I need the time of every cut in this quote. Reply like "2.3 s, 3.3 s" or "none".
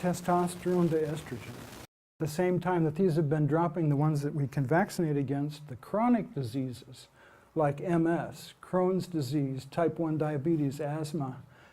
2.2 s